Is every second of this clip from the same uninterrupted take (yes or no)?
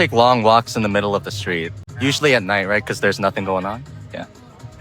yes